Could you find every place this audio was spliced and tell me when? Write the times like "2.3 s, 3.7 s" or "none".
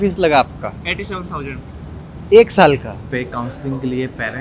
3.0 s